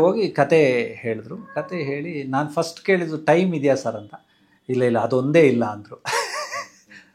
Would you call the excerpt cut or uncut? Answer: uncut